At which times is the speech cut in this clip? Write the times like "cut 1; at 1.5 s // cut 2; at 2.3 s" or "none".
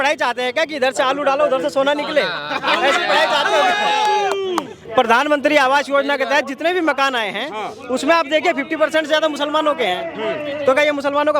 cut 1; at 4.8 s